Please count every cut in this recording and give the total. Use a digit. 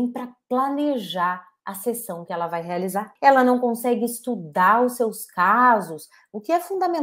1